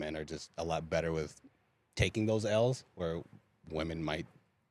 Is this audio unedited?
yes; 0 cuts

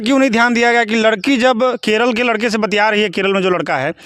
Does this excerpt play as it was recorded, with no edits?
yes; 0 cuts

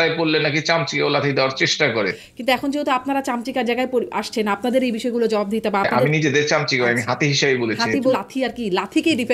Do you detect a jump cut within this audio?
yes; 3 cuts; at 2.3 s, 6.0 s, 8.2 s

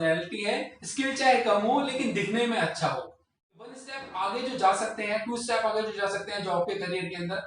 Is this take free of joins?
no; 1 cut; at 3.7 s

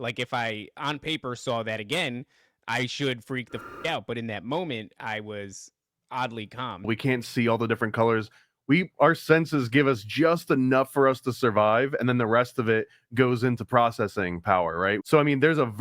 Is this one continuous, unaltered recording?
no; 2 cuts; at 6.9 s, 15.0 s

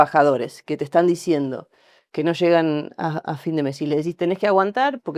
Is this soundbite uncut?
yes; 0 cuts

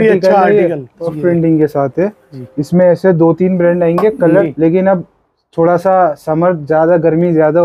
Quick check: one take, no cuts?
no; 2 cuts; at 1.1 s, 4.4 s

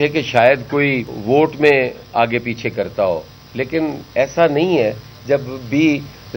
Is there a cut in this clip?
yes; 1 cut; at 1.1 s

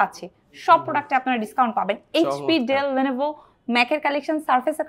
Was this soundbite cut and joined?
no; 0 cuts

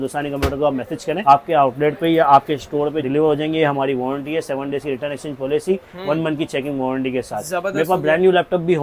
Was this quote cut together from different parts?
no; 0 cuts

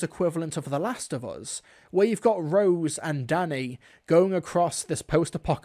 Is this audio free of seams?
yes; 0 cuts

